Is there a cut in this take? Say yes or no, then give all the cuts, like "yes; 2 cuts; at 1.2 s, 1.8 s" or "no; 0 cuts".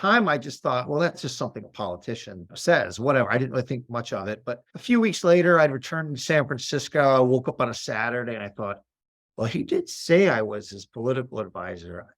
yes; 3 cuts; at 1.2 s, 2.6 s, 4.7 s